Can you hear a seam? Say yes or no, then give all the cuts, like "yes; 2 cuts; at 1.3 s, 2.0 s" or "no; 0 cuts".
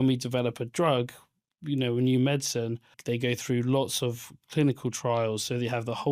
yes; 1 cut; at 2.9 s